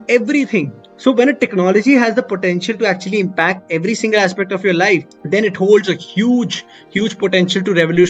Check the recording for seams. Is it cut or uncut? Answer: uncut